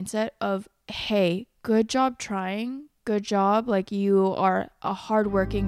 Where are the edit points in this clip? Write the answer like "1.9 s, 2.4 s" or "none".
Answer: none